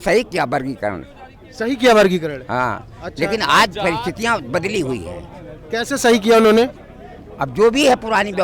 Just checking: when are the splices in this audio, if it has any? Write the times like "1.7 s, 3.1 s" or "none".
none